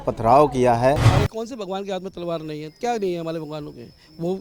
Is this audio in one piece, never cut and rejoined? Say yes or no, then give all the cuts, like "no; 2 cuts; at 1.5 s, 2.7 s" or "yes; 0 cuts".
no; 1 cut; at 1.1 s